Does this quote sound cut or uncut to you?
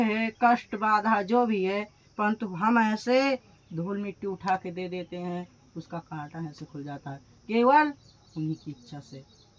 uncut